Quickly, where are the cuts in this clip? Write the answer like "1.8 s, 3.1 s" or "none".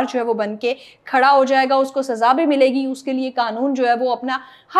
none